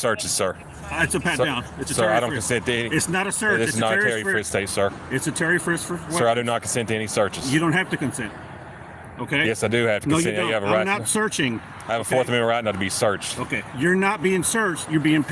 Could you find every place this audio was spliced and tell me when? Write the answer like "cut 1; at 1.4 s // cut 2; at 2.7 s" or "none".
none